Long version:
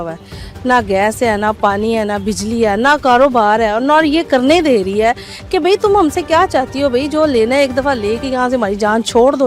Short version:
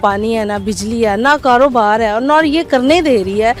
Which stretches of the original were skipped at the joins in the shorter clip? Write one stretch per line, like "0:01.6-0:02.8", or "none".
none